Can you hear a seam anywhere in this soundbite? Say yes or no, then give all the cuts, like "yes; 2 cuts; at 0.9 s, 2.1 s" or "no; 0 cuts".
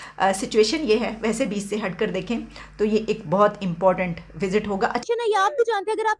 yes; 1 cut; at 5.1 s